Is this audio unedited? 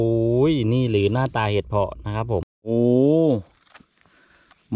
no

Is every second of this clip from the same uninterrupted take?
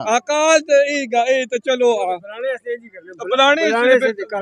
yes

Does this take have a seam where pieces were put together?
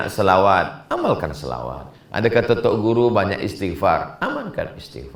no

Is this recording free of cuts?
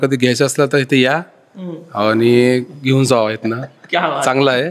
yes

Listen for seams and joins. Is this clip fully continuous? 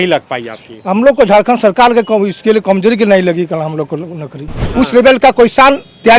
no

